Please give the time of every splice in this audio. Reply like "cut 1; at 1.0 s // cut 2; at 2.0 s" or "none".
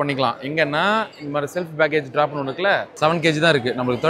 cut 1; at 2.9 s